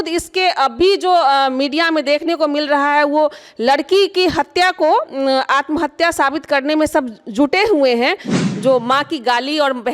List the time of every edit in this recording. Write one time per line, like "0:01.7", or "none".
0:08.3